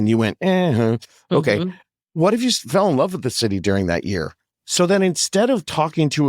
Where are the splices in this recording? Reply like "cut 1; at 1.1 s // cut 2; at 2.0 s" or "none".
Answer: cut 1; at 4.4 s